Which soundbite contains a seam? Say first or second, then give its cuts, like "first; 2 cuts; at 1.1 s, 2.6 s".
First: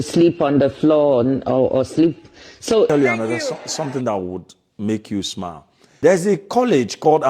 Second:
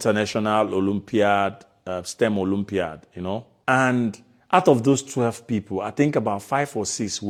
first; 1 cut; at 2.9 s